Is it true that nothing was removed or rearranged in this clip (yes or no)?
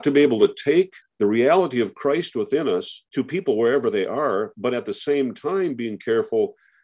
no